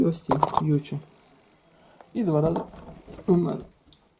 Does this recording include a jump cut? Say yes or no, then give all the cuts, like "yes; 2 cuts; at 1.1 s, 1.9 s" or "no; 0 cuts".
no; 0 cuts